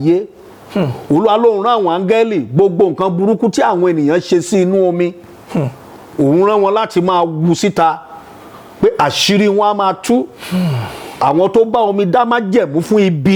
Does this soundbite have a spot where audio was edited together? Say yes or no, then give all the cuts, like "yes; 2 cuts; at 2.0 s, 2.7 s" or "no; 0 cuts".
no; 0 cuts